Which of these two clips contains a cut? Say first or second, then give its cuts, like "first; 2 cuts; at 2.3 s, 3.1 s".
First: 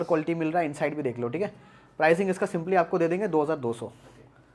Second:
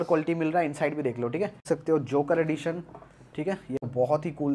second; 2 cuts; at 1.6 s, 3.8 s